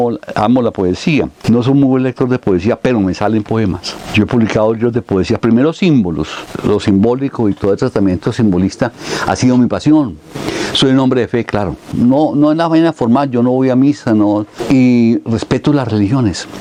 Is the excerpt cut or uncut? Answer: uncut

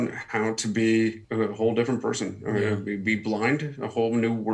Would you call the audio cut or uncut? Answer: cut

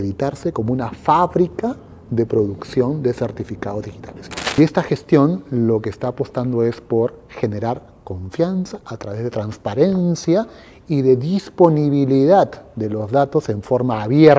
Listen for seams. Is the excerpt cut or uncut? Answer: cut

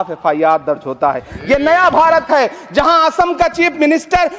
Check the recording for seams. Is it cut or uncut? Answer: uncut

